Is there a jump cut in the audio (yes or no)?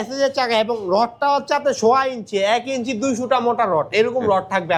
no